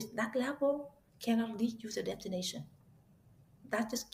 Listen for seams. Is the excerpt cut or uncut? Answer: uncut